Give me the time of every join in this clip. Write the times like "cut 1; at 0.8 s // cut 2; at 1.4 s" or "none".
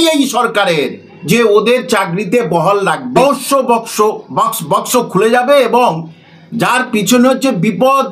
cut 1; at 3.2 s